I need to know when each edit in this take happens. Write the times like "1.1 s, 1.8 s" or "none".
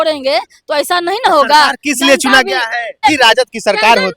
3.0 s